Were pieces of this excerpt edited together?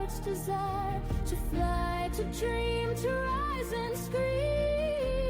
no; 0 cuts

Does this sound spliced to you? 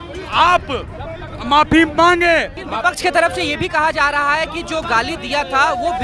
yes; 1 cut; at 2.6 s

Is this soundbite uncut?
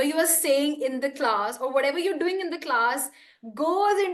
yes; 0 cuts

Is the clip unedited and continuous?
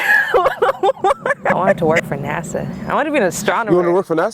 no; 1 cut; at 1.7 s

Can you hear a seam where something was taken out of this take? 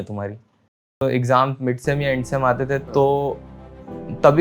yes; 1 cut; at 1.0 s

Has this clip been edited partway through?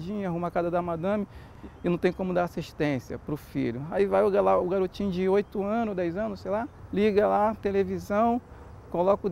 yes; 2 cuts; at 1.5 s, 6.8 s

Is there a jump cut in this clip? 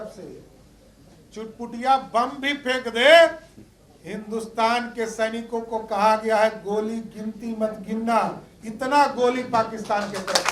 no; 0 cuts

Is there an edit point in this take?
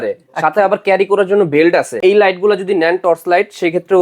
yes; 1 cut; at 2.0 s

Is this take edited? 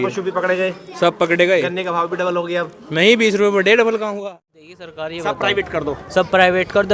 yes; 1 cut; at 4.2 s

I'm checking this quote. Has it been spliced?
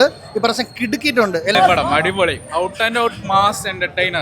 yes; 1 cut; at 1.5 s

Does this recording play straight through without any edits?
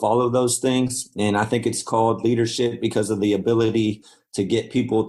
yes; 0 cuts

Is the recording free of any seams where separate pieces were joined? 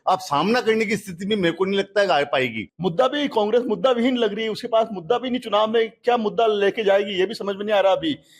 no; 1 cut; at 2.6 s

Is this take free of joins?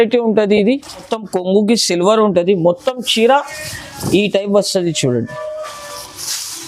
no; 1 cut; at 1.2 s

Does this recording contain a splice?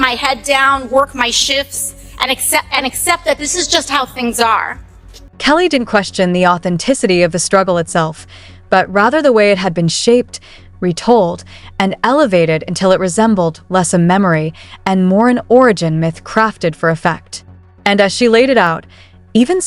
no; 0 cuts

